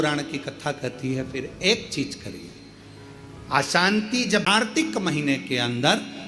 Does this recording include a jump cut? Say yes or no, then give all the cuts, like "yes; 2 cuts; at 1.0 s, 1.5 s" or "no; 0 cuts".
yes; 1 cut; at 4.5 s